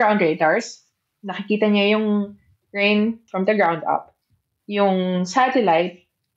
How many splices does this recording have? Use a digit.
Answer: 1